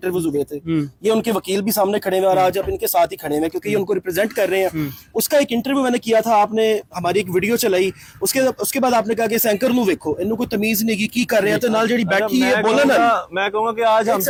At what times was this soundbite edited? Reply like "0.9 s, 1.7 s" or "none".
none